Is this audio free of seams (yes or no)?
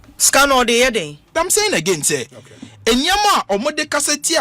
no